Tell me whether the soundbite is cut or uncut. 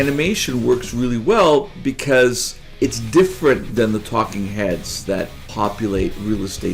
cut